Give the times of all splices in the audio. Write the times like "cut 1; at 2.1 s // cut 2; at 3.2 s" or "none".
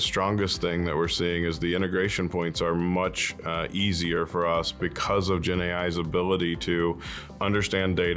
none